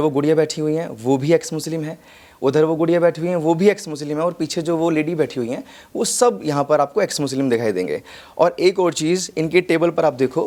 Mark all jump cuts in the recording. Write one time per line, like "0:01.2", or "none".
none